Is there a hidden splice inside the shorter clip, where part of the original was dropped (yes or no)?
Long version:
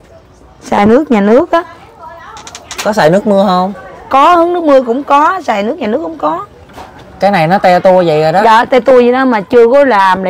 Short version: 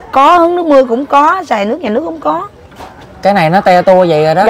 no